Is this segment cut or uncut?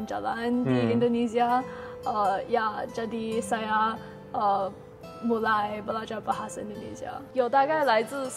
cut